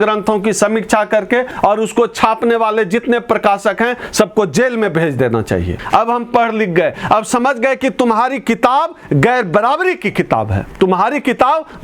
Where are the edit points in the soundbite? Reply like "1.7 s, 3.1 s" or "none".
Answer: 5.7 s, 10.6 s